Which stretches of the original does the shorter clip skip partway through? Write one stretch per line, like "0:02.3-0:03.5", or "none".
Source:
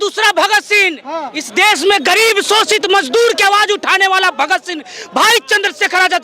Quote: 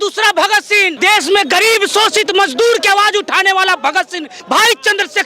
0:00.9-0:01.5
0:04.8-0:04.9